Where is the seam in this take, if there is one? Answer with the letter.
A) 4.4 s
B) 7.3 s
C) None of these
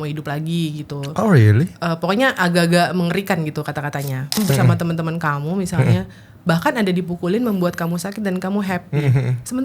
A